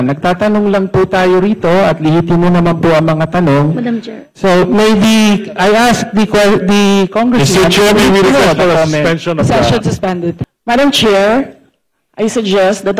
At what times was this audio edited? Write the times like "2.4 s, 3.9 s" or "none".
10.4 s